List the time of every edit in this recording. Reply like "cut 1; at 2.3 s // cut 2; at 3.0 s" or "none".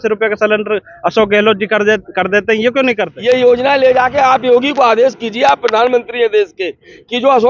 cut 1; at 3.1 s